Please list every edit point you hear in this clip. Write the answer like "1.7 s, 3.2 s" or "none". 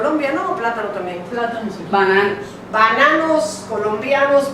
3.0 s